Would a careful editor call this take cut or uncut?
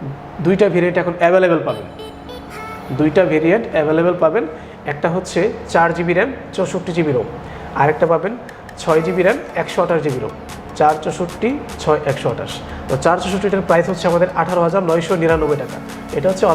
uncut